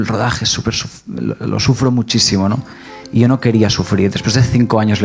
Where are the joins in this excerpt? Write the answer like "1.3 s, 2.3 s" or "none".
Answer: none

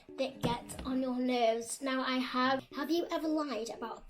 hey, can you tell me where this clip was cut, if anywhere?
2.7 s

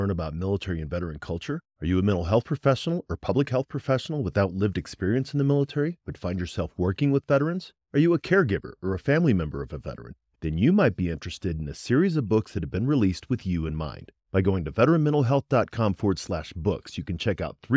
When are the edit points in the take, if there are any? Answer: none

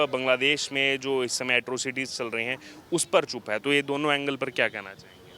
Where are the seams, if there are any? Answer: none

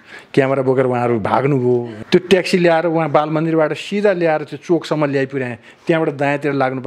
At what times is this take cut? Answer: 2.0 s

